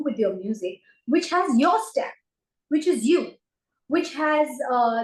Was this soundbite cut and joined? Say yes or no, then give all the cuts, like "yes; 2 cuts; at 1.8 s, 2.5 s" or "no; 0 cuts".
no; 0 cuts